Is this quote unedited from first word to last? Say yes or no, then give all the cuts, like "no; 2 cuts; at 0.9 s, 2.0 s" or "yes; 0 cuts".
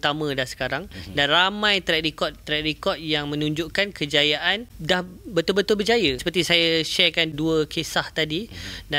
no; 3 cuts; at 4.7 s, 6.2 s, 7.3 s